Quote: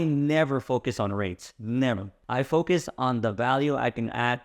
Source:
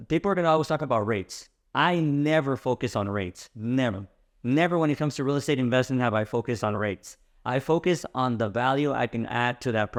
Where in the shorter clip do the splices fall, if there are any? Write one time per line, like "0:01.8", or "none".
0:02.1